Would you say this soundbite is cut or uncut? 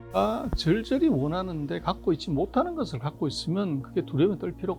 uncut